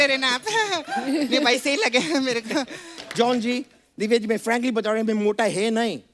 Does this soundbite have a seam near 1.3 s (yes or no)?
no